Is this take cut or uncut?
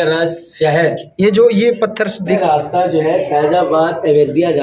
cut